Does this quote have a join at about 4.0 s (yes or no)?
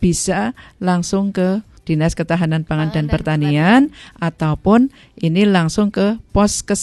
no